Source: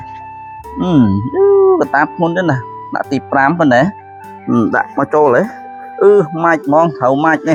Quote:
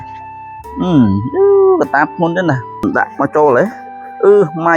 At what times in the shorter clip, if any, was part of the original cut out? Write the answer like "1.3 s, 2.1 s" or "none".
2.8 s